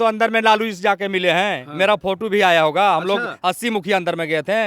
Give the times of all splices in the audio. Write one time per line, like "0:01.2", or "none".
none